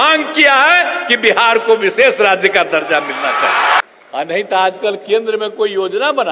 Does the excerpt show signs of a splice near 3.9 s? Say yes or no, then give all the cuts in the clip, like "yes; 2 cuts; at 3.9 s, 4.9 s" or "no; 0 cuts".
yes; 1 cut; at 3.9 s